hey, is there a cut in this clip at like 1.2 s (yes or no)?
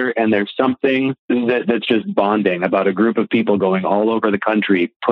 yes